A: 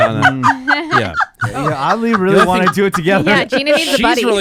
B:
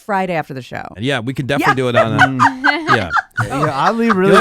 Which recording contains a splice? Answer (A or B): B